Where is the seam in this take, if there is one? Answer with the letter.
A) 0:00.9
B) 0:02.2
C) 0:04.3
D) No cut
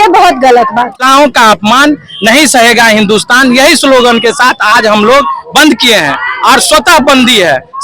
A